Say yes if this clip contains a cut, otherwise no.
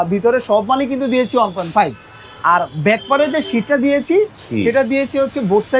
no